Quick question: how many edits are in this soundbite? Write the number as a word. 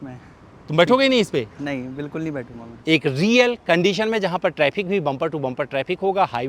one